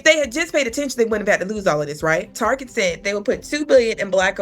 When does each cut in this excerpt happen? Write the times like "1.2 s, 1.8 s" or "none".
2.3 s